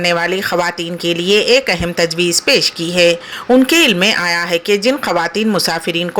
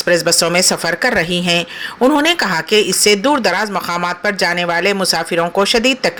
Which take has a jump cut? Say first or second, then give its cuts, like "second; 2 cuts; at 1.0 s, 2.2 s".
first; 1 cut; at 3.3 s